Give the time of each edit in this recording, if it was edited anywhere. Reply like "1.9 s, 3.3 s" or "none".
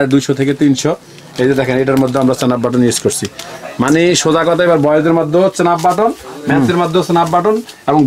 none